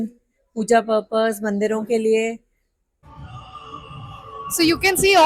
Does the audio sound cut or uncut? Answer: cut